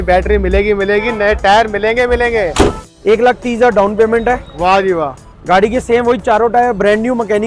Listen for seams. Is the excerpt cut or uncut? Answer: cut